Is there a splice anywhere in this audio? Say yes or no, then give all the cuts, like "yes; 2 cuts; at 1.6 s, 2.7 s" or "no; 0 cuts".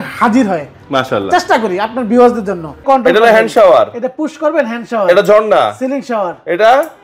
yes; 1 cut; at 2.8 s